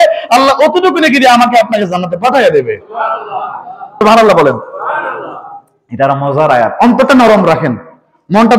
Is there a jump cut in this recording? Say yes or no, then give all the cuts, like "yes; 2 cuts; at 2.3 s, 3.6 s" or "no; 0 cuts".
yes; 1 cut; at 3.8 s